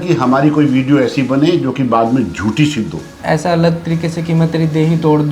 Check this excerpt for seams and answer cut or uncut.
cut